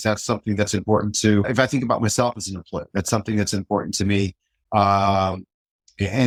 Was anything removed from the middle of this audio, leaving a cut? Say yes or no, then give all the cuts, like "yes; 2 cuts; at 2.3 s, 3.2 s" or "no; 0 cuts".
no; 0 cuts